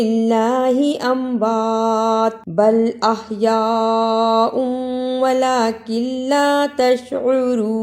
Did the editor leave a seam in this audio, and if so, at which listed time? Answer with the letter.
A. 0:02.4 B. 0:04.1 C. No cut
A